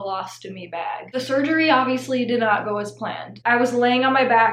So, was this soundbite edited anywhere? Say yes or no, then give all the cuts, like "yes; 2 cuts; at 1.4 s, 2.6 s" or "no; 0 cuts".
yes; 2 cuts; at 1.1 s, 3.3 s